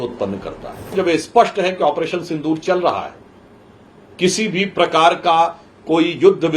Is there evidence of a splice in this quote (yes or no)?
yes